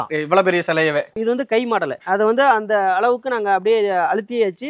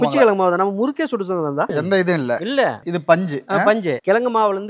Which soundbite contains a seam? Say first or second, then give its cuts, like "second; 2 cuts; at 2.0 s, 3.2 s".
first; 1 cut; at 1.1 s